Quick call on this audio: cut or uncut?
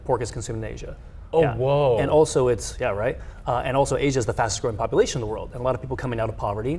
uncut